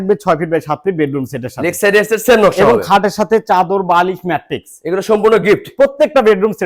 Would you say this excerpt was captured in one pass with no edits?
yes; 0 cuts

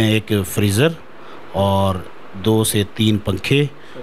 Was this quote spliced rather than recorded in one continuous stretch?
no; 0 cuts

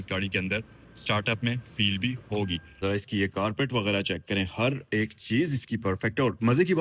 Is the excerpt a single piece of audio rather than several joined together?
no; 1 cut; at 2.7 s

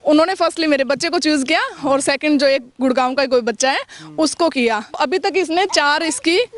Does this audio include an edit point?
yes; 1 cut; at 5.0 s

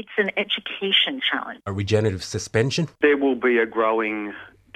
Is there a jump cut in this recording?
yes; 1 cut; at 1.5 s

